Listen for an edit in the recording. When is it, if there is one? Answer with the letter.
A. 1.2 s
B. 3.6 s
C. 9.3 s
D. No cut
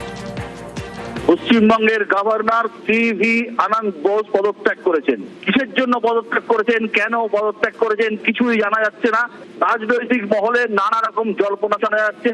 A